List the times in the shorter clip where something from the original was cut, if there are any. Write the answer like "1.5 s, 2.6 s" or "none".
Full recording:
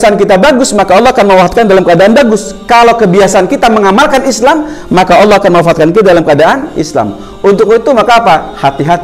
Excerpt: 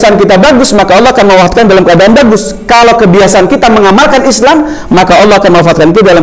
none

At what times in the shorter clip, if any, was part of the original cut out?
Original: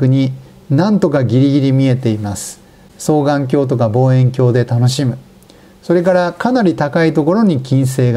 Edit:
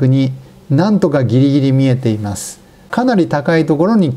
2.9 s

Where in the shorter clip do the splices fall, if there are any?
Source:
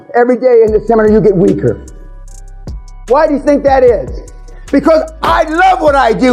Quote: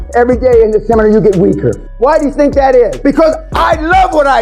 1.9 s, 3.0 s

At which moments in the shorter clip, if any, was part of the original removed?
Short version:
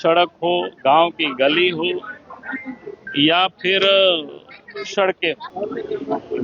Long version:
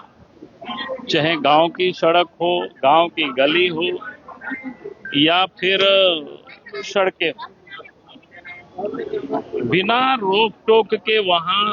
5.5 s

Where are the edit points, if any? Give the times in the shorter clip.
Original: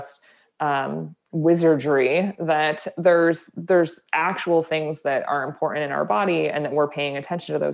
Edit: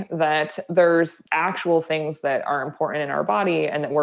1.2 s

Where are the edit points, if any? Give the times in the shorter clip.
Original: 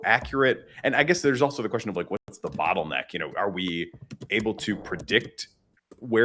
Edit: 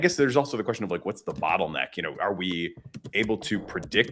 1.2 s

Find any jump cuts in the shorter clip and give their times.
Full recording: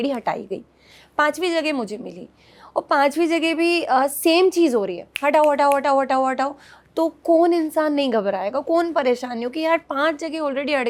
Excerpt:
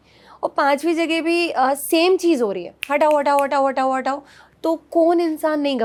none

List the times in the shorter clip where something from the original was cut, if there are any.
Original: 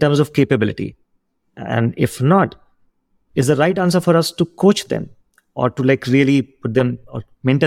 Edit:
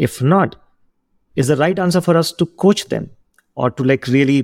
none

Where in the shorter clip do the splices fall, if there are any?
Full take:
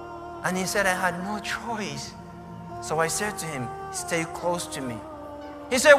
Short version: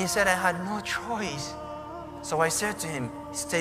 none

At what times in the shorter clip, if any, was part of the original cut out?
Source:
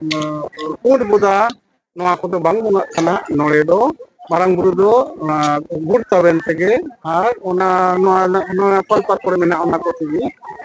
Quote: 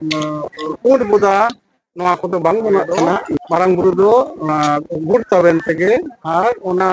3.3 s

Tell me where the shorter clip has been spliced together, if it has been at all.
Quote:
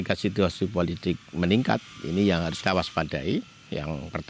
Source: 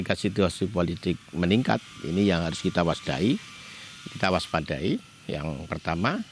2.5 s

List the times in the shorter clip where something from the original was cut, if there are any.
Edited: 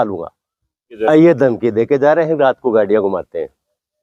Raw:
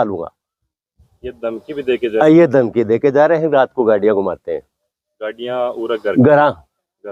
0.9 s

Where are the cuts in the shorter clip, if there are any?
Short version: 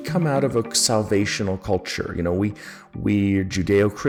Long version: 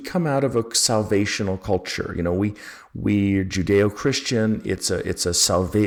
none

